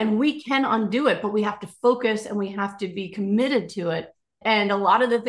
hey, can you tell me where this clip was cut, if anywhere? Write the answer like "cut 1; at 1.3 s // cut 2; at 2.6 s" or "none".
cut 1; at 4.4 s